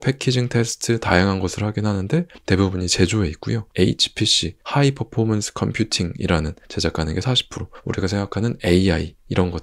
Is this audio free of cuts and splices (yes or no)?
no